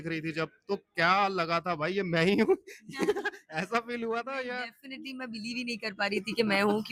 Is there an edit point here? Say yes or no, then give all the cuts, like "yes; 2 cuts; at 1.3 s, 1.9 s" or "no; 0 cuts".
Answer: no; 0 cuts